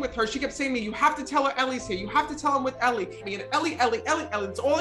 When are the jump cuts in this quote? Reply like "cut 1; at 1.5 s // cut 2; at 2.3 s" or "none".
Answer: cut 1; at 3.2 s